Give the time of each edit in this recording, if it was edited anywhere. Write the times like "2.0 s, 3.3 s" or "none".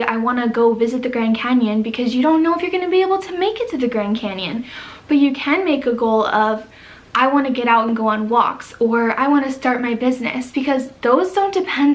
none